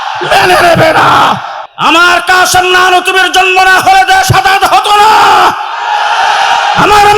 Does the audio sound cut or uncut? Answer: cut